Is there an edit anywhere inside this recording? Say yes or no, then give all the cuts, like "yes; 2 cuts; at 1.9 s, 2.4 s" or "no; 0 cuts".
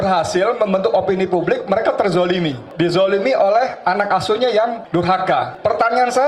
yes; 2 cuts; at 2.6 s, 5.1 s